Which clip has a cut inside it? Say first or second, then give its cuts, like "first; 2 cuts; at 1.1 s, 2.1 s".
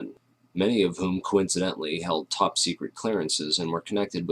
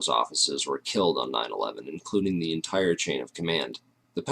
second; 1 cut; at 1.0 s